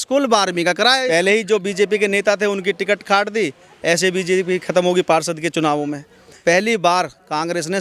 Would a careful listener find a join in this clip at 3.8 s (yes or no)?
no